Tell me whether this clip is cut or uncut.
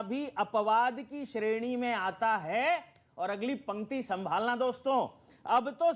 uncut